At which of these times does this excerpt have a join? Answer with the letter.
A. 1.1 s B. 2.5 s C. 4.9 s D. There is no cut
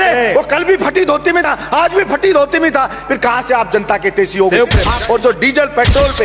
C